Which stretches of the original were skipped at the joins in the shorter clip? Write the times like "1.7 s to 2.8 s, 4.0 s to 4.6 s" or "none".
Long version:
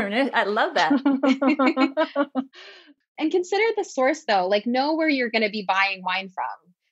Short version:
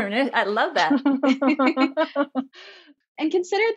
none